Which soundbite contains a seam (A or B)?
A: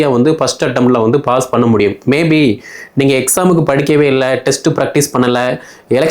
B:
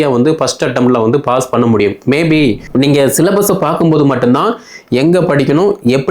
B